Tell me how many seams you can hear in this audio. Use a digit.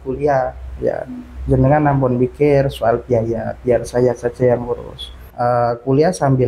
1